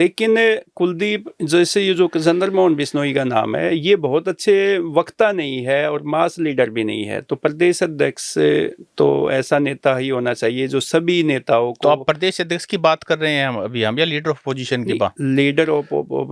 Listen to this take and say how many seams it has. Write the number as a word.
zero